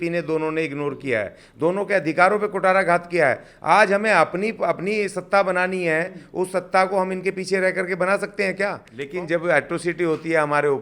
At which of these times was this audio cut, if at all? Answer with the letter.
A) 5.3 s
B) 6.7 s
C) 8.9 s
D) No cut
C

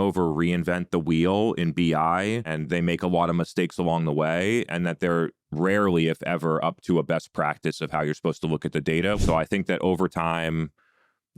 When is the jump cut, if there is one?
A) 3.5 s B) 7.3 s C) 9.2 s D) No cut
C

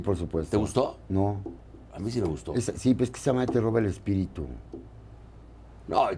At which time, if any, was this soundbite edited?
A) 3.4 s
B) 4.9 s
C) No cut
C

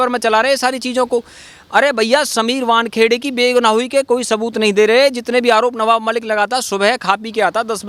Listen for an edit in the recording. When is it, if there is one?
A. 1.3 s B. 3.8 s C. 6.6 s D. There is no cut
D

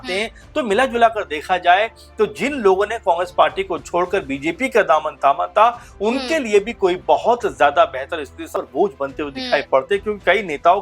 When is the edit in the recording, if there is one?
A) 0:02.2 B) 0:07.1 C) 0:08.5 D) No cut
C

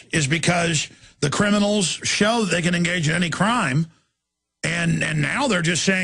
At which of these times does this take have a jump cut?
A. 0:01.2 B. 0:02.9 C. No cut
B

